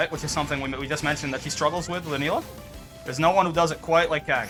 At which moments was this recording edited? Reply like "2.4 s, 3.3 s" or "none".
none